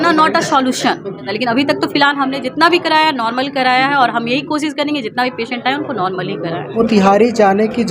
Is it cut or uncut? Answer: cut